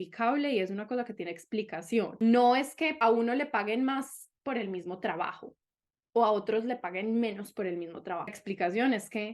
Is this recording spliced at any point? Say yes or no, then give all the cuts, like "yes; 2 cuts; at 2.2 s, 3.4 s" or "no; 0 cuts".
yes; 3 cuts; at 2.2 s, 2.9 s, 8.4 s